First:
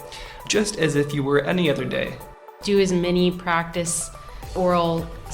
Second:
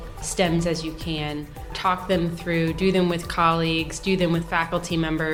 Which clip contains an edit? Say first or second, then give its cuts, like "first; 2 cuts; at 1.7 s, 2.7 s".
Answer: first; 1 cut; at 2.4 s